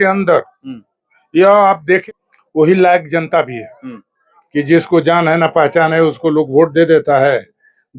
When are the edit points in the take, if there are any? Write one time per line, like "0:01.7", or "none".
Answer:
0:02.0